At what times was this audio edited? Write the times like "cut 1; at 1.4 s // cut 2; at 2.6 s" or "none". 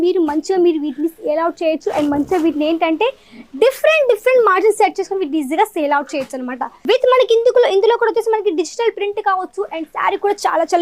cut 1; at 6.7 s